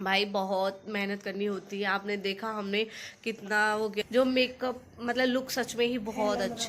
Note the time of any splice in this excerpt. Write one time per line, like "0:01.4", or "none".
0:04.0